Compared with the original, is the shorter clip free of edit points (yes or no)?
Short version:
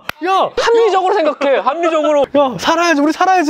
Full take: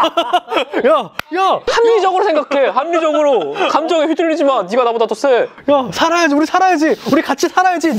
no